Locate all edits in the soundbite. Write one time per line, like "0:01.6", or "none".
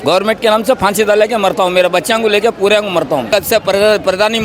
0:03.3